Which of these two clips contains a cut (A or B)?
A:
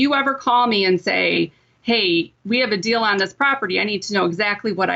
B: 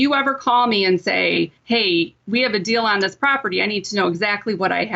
B